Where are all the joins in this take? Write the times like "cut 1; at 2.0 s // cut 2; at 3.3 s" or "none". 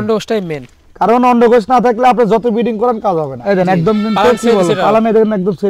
cut 1; at 3.3 s